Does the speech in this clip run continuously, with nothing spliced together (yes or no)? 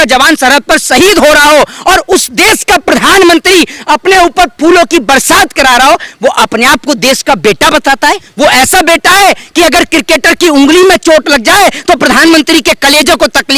no